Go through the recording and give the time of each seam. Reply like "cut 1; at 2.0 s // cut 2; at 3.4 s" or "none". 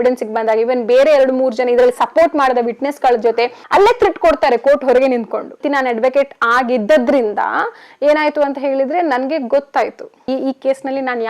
cut 1; at 3.6 s // cut 2; at 5.6 s

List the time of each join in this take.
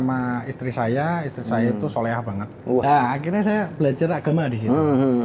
cut 1; at 2.8 s

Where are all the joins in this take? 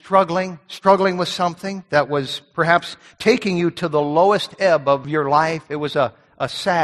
cut 1; at 5.1 s

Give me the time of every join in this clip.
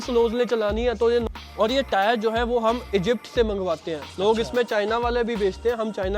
cut 1; at 1.2 s

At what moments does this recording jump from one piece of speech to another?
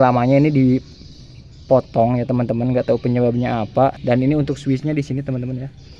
cut 1; at 4.0 s

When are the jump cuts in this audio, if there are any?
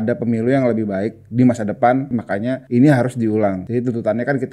cut 1; at 2.3 s // cut 2; at 3.6 s

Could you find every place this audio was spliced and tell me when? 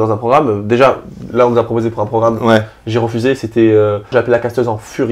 cut 1; at 4.1 s

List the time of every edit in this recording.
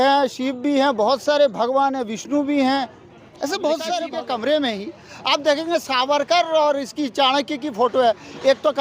cut 1; at 4.1 s

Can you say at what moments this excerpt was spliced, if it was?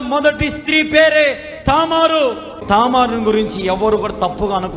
cut 1; at 2.6 s

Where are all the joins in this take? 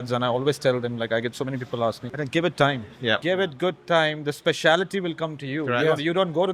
cut 1; at 2.1 s // cut 2; at 3.2 s

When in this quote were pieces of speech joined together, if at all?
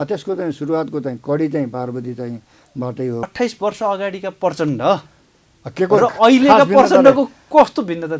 cut 1; at 3.3 s

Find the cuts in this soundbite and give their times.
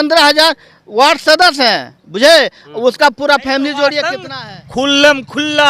cut 1; at 4.2 s

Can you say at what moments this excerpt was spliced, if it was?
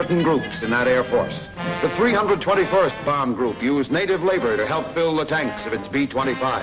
cut 1; at 1.8 s

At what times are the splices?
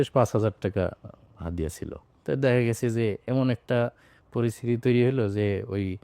cut 1; at 2.0 s

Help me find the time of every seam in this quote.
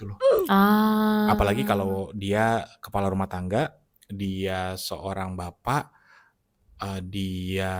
none

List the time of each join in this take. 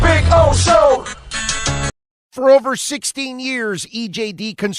cut 1; at 1.8 s

